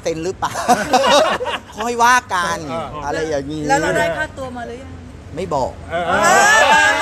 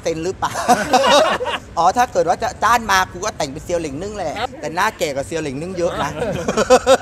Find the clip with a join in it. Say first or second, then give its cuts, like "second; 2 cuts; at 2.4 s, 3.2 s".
second; 2 cuts; at 1.6 s, 4.4 s